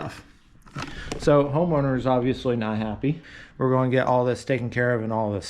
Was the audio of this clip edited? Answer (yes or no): yes